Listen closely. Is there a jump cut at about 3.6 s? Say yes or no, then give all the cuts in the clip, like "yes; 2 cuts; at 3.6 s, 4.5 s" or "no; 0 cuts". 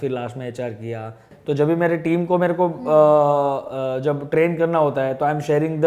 no; 1 cut; at 1.3 s